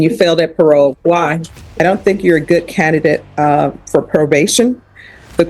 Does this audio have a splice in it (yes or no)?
yes